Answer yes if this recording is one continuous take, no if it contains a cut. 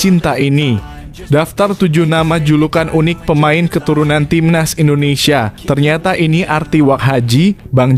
yes